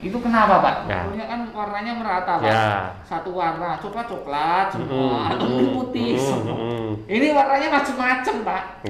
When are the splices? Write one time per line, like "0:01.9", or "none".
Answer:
0:01.1

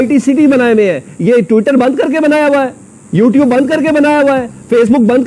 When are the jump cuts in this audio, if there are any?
none

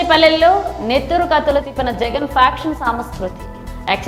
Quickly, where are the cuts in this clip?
none

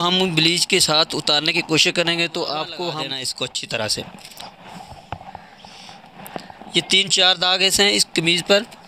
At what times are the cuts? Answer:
0:03.2

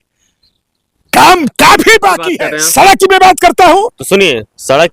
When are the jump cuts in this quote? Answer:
0:02.2

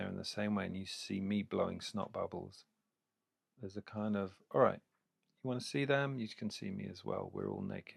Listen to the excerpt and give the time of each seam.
none

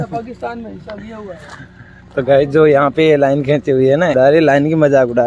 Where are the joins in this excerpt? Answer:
none

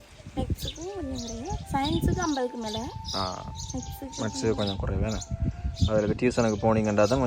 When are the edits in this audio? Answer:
none

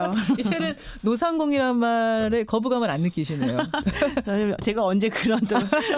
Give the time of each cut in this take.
0:02.1

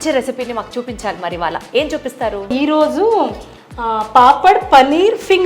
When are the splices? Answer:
0:02.5

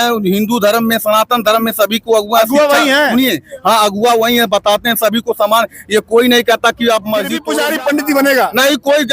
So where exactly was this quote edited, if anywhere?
0:07.4

